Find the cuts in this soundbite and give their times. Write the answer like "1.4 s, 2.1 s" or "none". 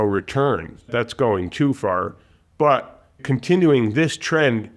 0.9 s, 3.2 s